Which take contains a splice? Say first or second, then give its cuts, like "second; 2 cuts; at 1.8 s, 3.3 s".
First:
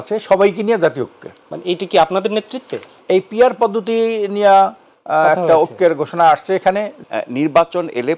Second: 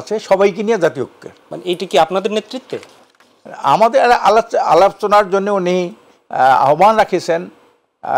first; 2 cuts; at 3.0 s, 7.0 s